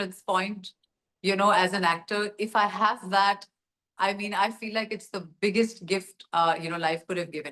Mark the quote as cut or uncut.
uncut